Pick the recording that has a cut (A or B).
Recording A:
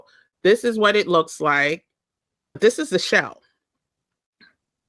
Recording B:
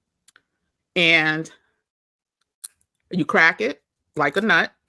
A